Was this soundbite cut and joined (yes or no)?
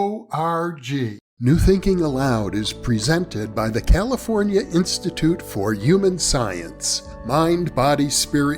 yes